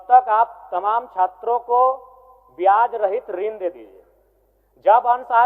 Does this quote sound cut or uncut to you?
uncut